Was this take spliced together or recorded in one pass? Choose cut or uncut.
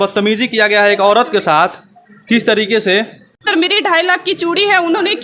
cut